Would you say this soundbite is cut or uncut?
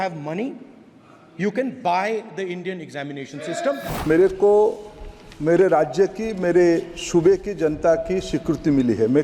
cut